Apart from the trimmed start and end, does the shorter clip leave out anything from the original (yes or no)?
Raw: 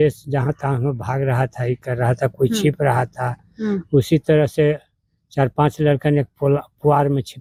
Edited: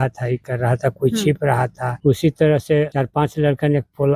yes